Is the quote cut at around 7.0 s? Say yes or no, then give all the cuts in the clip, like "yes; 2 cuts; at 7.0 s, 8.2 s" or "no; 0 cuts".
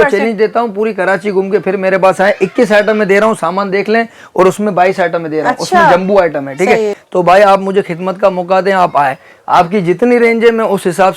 yes; 1 cut; at 7.0 s